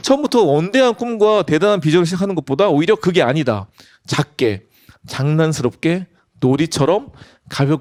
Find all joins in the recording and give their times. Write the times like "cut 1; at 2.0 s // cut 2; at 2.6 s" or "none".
none